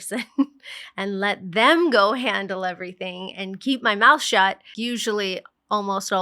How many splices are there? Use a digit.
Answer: 1